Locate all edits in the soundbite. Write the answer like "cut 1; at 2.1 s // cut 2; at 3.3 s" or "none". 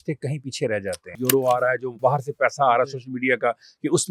cut 1; at 1.2 s // cut 2; at 1.9 s